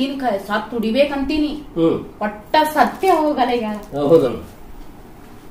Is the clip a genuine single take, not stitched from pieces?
no; 1 cut; at 4.3 s

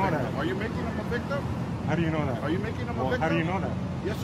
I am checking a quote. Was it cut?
no; 0 cuts

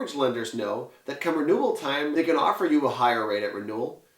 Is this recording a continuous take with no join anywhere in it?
no; 1 cut; at 2.1 s

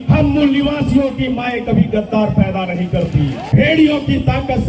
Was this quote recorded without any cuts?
no; 1 cut; at 3.4 s

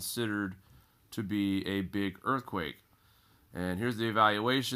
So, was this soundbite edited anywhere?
yes; 1 cut; at 1.4 s

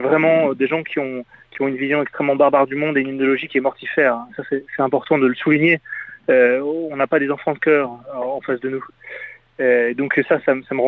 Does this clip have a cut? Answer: no; 0 cuts

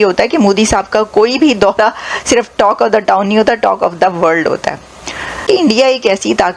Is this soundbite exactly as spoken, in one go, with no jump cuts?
no; 1 cut; at 5.4 s

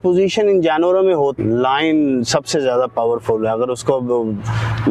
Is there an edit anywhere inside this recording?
yes; 1 cut; at 1.4 s

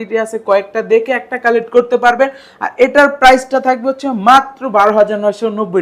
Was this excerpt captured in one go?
yes; 0 cuts

